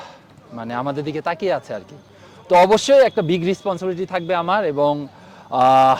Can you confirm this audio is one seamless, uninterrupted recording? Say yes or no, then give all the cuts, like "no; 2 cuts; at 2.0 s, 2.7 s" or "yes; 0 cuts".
yes; 0 cuts